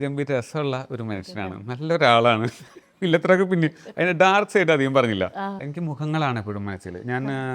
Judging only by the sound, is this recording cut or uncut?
cut